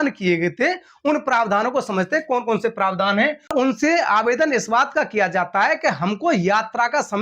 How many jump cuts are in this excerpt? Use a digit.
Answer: 1